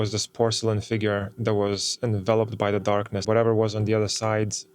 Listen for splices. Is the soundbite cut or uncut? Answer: cut